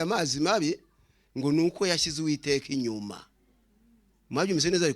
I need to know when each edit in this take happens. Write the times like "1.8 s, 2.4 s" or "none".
none